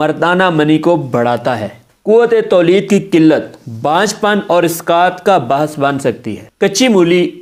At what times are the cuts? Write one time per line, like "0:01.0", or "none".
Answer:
none